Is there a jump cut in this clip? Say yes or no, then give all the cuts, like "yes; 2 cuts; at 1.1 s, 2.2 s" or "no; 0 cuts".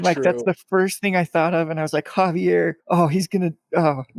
yes; 1 cut; at 2.8 s